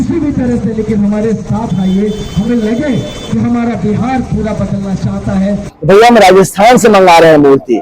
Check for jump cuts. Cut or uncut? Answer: cut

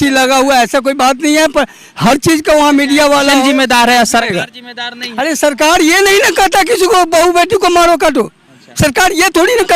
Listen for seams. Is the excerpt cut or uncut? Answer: cut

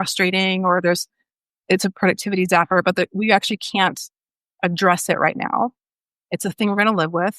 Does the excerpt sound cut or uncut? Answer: uncut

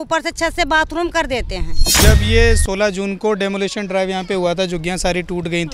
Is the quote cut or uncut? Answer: cut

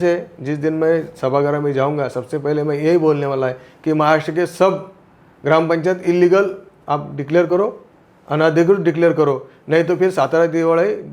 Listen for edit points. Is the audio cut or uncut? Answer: uncut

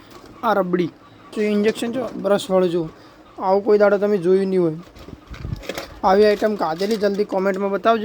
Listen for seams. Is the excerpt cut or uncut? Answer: cut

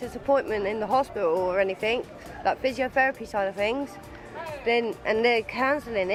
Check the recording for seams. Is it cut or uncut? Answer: uncut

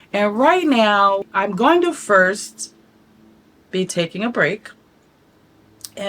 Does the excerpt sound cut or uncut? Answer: cut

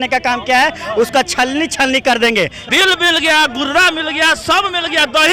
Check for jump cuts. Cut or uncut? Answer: cut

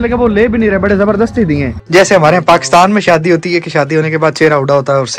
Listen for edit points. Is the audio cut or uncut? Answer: cut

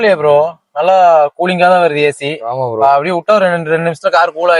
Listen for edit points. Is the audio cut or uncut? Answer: uncut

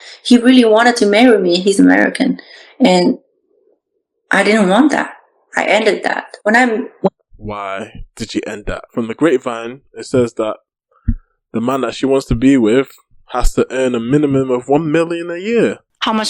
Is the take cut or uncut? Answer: cut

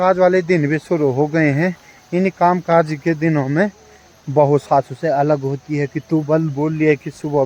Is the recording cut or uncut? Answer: uncut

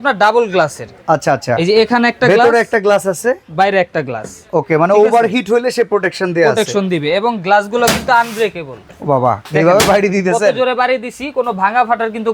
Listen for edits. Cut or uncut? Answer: uncut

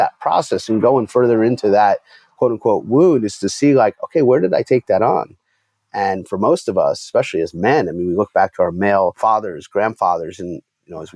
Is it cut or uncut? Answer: cut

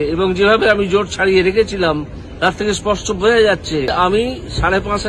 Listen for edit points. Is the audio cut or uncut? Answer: cut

